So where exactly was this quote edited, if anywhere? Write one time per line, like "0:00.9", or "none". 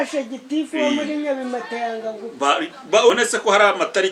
0:03.1

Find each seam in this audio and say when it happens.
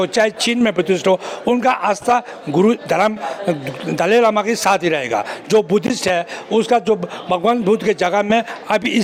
none

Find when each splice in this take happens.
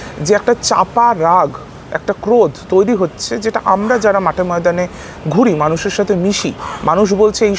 none

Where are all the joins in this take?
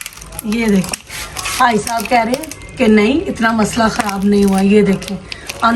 none

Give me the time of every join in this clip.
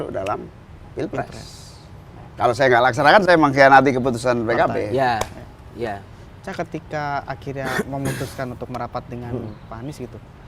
none

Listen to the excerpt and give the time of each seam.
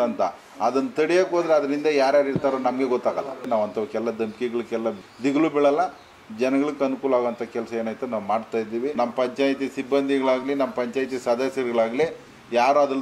0:03.4
0:05.0
0:08.9

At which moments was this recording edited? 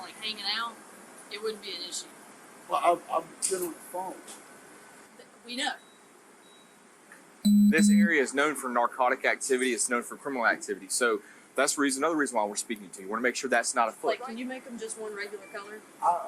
0:14.1

